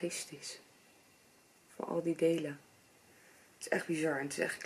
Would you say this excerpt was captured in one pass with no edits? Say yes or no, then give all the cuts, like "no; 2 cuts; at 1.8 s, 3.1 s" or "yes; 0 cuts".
yes; 0 cuts